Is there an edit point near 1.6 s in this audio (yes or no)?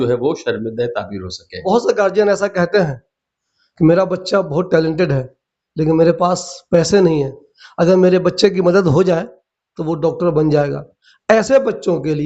yes